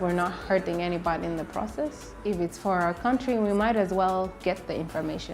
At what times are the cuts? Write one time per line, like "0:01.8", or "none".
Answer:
0:02.1